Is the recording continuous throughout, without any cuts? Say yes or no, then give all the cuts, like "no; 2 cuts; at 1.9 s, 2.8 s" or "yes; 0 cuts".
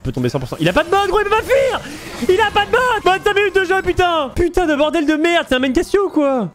yes; 0 cuts